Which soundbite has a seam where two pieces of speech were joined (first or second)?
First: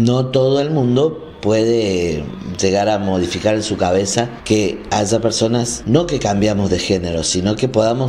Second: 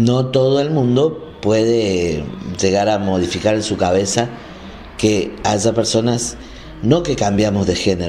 first